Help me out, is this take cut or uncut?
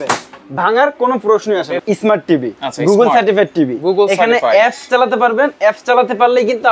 cut